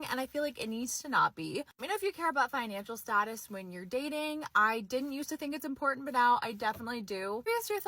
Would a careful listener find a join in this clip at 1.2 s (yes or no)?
no